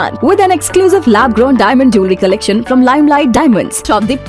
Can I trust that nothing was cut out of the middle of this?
yes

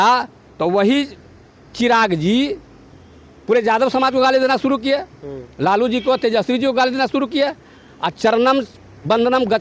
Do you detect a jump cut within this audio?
no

